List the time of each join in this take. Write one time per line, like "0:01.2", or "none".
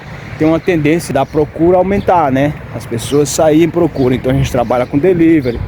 0:01.1